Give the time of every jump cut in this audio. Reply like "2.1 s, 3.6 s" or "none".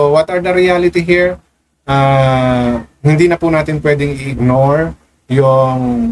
none